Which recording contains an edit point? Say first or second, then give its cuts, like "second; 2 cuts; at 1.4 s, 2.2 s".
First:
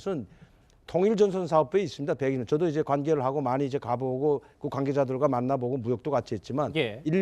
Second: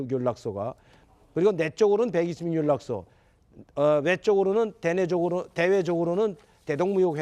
first; 1 cut; at 1.3 s